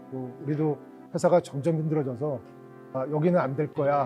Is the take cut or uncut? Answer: cut